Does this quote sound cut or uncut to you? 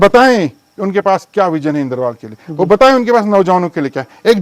uncut